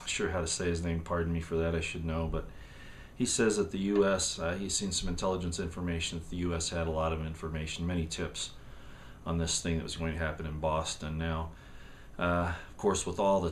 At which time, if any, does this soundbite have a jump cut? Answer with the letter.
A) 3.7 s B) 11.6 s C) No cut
A